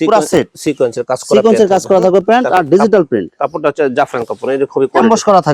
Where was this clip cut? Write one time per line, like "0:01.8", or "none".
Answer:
none

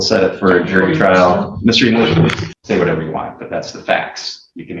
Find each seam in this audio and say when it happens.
0:02.5

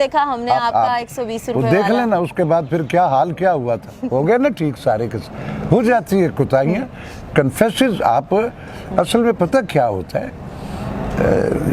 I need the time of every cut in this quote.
none

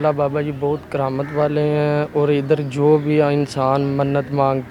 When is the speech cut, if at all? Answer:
none

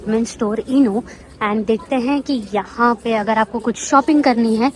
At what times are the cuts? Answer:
none

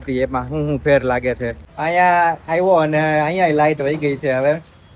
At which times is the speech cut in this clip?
0:01.6

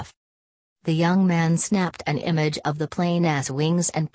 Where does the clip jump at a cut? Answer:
0:02.8

